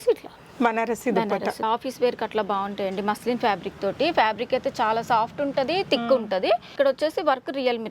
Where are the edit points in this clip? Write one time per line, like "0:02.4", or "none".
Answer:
0:01.6
0:06.7